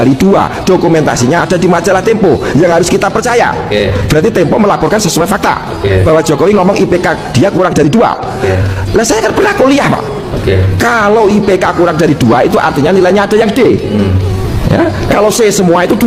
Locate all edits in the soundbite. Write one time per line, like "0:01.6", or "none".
none